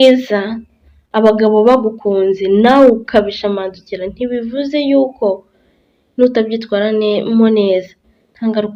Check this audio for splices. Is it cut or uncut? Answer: uncut